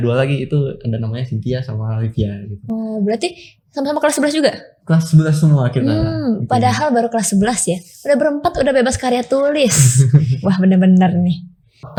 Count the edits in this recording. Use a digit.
0